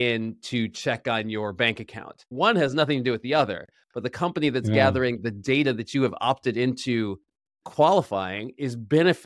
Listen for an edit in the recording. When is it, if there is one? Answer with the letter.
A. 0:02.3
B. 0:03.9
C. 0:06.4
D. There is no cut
A